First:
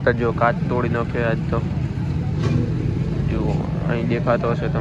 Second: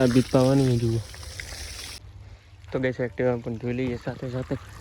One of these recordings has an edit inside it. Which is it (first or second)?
second